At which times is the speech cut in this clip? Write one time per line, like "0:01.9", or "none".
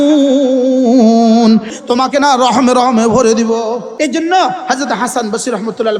0:01.7
0:03.9